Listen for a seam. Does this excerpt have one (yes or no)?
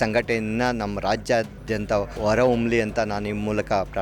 yes